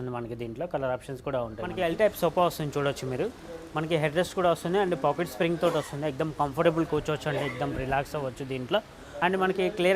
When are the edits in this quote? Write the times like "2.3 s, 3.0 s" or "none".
1.7 s, 9.1 s